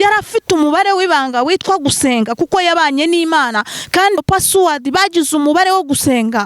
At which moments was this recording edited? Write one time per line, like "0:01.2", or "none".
0:04.2